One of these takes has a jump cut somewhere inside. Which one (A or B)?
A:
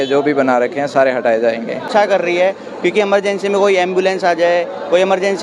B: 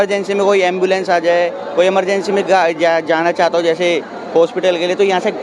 A